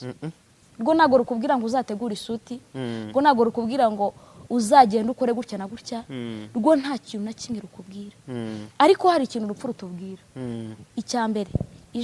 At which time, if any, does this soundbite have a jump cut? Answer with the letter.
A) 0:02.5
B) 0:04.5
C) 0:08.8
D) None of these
D